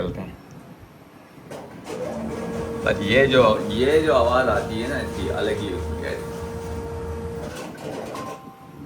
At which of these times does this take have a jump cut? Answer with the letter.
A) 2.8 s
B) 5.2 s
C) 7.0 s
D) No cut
C